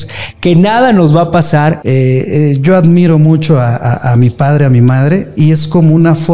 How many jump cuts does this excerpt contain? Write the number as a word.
one